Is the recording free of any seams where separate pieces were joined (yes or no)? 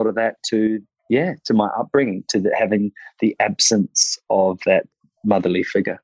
no